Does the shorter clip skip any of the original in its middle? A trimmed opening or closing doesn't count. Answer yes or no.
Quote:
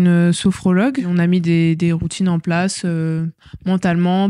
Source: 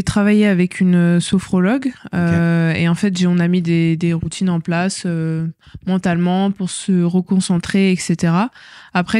yes